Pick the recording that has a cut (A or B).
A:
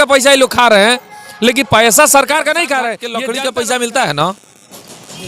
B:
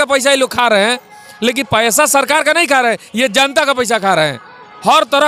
A